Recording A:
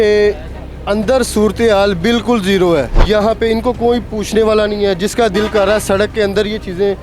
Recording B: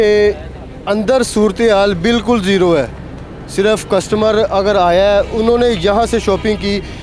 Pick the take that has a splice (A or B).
A